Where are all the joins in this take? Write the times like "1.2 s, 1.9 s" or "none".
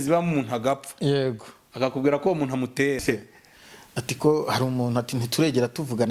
3.0 s